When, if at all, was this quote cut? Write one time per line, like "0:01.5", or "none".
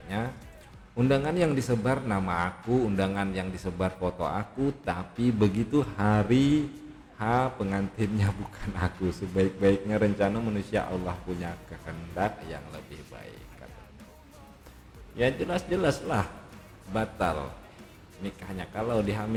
none